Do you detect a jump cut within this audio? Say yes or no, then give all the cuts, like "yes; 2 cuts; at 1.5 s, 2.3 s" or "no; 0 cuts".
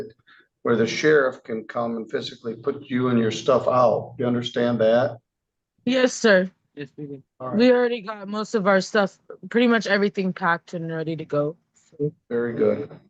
no; 0 cuts